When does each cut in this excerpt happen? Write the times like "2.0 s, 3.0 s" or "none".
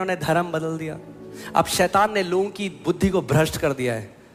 none